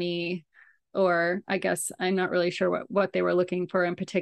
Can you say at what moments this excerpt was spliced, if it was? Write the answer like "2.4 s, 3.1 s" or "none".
none